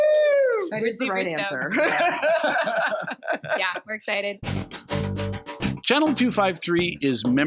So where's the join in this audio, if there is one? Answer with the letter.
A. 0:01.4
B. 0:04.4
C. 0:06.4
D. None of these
B